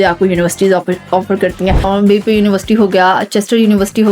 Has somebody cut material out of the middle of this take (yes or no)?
yes